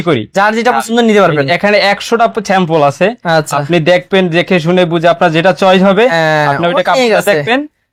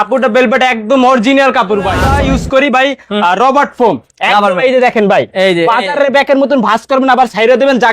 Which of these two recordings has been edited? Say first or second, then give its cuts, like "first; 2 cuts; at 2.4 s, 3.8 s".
second; 1 cut; at 2.1 s